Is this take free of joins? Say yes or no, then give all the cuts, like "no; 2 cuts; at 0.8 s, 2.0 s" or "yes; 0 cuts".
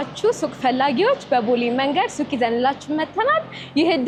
yes; 0 cuts